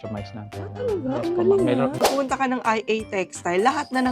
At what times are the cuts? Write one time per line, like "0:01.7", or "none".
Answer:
0:02.0